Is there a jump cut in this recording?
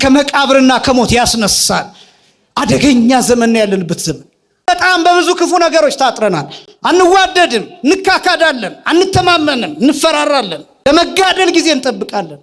yes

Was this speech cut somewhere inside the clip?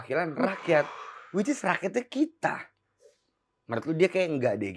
no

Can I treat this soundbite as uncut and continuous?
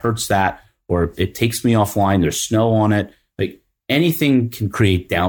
yes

